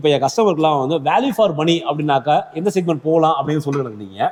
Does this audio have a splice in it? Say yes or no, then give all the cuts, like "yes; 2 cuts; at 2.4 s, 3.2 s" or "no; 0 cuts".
no; 0 cuts